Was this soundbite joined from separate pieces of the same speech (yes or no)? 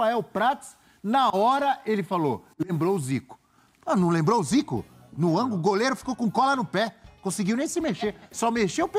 no